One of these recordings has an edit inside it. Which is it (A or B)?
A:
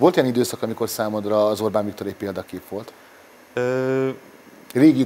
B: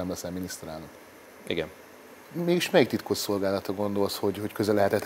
B